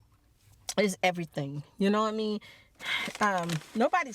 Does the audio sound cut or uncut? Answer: uncut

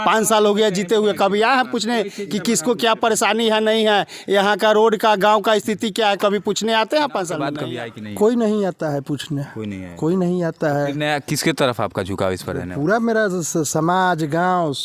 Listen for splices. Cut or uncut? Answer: cut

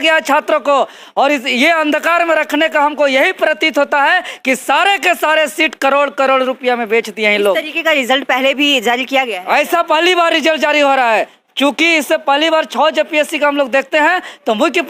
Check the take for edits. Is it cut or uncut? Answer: uncut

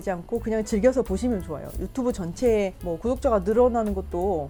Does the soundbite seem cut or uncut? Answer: uncut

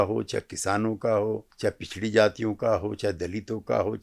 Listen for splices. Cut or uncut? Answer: cut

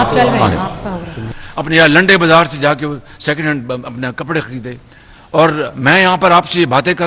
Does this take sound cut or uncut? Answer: cut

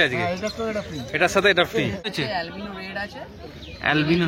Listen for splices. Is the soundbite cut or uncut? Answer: cut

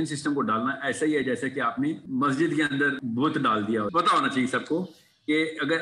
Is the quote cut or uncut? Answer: cut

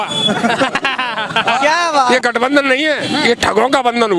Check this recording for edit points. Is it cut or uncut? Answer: cut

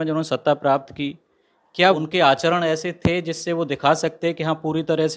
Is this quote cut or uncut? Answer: cut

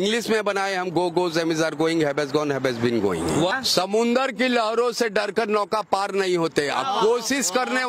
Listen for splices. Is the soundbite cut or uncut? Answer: cut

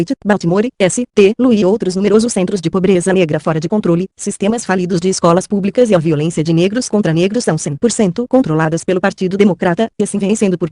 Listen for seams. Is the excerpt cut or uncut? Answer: uncut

